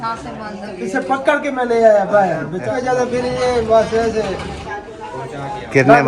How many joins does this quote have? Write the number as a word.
one